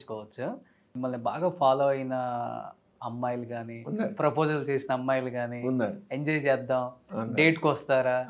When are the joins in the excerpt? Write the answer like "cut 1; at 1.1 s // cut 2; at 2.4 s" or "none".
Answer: cut 1; at 0.9 s